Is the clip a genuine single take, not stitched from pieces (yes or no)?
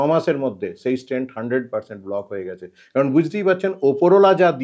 yes